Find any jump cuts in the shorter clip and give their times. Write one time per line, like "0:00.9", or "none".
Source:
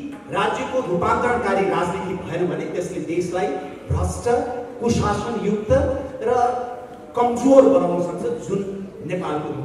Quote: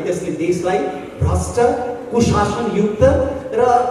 none